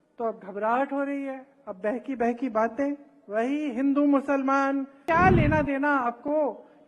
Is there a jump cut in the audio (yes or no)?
yes